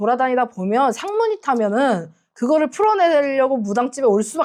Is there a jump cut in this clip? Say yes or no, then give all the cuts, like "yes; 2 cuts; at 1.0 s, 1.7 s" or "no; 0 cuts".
no; 0 cuts